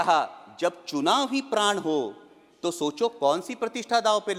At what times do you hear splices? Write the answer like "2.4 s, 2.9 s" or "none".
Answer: none